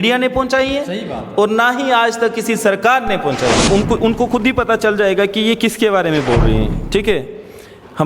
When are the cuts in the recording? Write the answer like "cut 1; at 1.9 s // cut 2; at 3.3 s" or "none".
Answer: cut 1; at 3.6 s